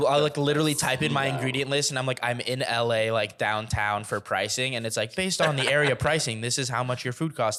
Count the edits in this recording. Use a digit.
0